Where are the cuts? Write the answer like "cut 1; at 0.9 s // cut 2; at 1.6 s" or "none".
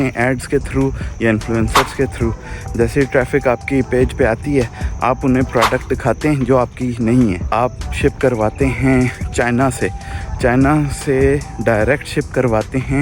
cut 1; at 7.4 s // cut 2; at 9.2 s